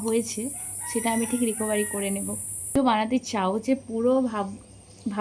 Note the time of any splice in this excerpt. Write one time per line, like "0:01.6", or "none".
0:02.8